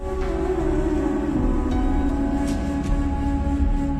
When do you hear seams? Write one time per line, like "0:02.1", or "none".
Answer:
0:03.1